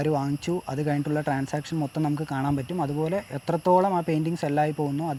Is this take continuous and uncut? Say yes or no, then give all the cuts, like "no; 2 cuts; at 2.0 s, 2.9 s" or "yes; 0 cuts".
yes; 0 cuts